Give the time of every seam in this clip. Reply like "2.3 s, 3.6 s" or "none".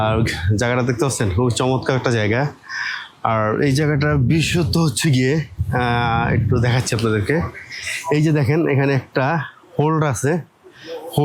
none